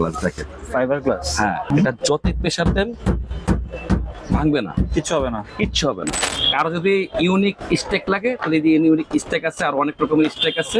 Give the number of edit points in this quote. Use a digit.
2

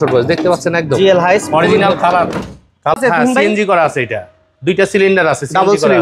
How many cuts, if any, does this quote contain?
1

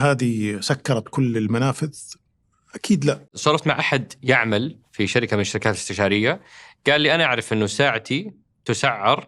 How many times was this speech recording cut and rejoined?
1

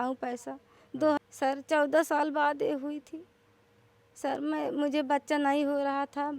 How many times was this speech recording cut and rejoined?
1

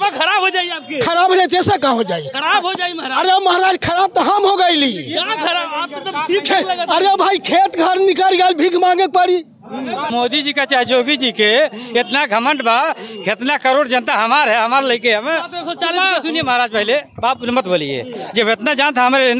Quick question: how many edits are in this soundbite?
1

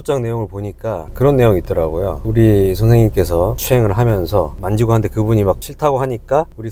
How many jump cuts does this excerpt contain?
0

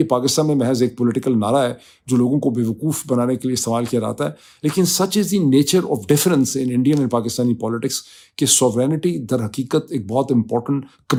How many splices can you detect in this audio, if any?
0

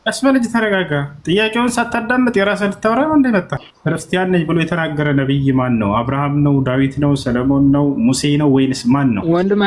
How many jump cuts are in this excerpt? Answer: 1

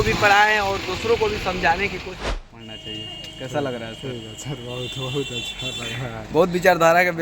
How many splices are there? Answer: 1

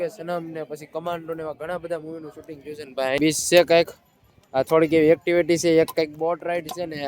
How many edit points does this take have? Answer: 1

